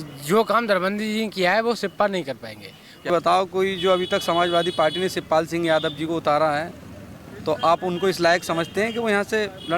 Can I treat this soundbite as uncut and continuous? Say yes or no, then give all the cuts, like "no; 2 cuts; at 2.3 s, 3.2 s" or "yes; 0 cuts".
no; 1 cut; at 3.1 s